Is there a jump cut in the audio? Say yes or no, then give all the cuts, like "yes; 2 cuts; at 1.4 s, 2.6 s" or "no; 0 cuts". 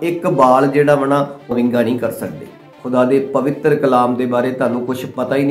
yes; 2 cuts; at 1.5 s, 2.7 s